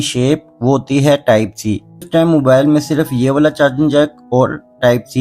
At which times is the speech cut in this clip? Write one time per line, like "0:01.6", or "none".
0:02.1